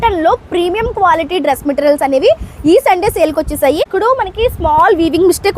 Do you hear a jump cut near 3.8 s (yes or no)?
yes